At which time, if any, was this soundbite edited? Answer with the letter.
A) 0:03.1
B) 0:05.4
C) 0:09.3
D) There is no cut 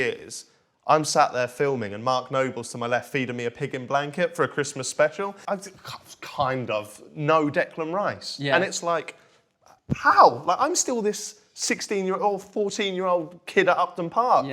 B